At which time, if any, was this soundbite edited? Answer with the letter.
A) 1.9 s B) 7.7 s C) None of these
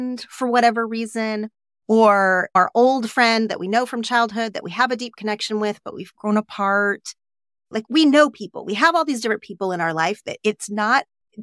B